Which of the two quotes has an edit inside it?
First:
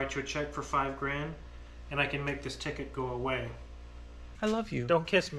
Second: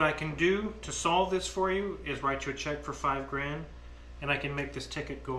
first; 1 cut; at 4.2 s

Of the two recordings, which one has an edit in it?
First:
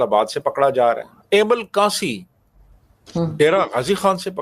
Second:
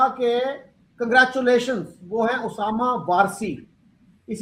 first; 1 cut; at 1.1 s

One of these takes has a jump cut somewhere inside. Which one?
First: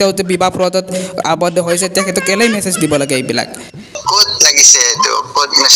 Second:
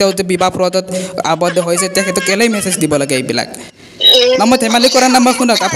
first; 1 cut; at 3.8 s

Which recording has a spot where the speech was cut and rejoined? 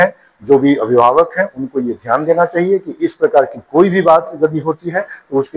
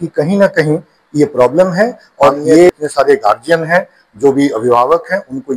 second; 1 cut; at 2.7 s

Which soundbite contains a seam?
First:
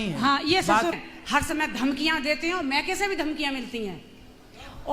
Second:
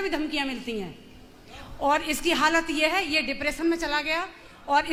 first; 1 cut; at 1.1 s

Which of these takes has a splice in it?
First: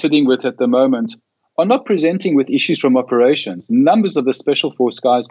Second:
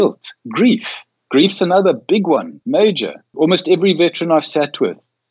second; 2 cuts; at 2.5 s, 3.3 s

